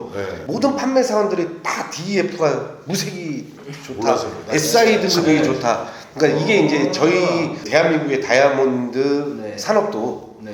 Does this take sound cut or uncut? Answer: uncut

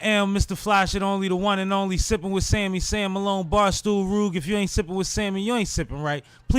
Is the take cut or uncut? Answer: uncut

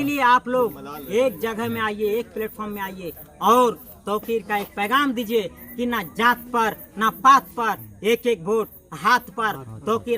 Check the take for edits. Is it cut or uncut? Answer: uncut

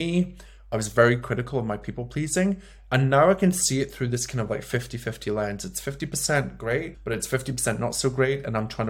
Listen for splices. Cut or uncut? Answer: cut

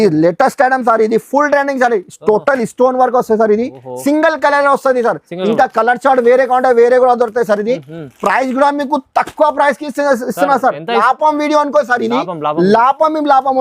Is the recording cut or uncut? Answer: cut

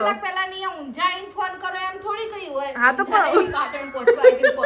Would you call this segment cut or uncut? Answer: uncut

